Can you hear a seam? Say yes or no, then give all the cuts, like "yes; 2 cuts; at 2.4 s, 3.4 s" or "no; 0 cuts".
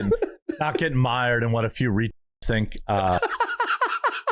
no; 0 cuts